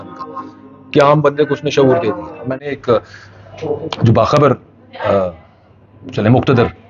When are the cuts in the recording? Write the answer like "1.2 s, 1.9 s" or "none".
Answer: 2.5 s